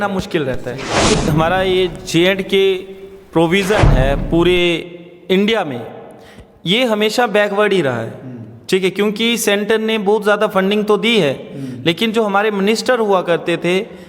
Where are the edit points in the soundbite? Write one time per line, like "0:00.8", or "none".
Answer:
0:01.1

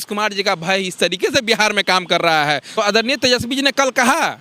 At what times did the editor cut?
0:02.8

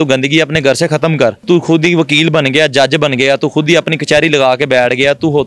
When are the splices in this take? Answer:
0:01.4

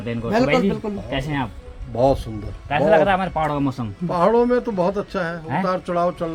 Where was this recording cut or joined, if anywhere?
none

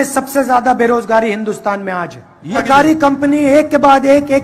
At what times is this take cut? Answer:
none

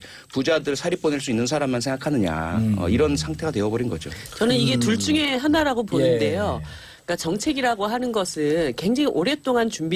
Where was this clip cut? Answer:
none

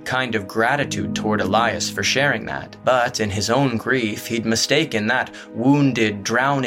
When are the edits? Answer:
0:02.6

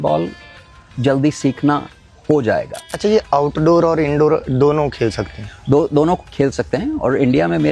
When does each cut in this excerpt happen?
0:02.8

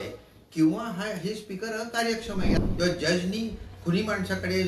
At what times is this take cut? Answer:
0:02.6

